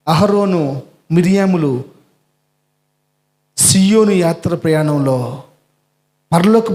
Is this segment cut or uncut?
uncut